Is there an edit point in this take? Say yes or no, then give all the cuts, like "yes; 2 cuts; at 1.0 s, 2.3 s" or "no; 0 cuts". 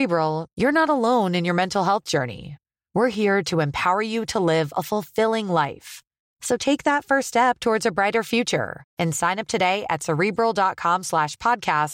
no; 0 cuts